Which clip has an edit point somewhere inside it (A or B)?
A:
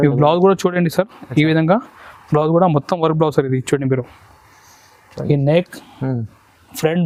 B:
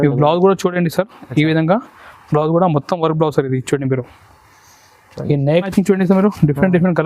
B